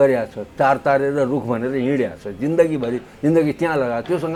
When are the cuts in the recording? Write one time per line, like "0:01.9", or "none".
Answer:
none